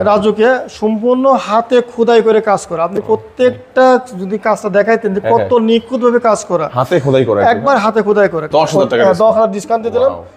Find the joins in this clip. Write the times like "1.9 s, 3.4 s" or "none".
8.5 s